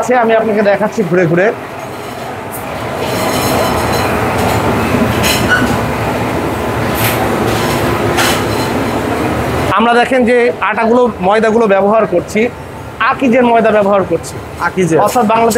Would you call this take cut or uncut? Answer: uncut